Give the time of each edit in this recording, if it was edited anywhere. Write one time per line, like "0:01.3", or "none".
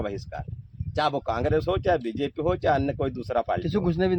none